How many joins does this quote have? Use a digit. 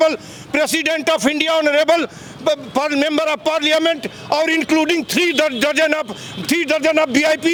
0